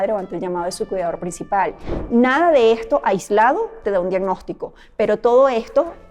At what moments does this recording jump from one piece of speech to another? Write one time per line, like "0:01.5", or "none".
0:01.9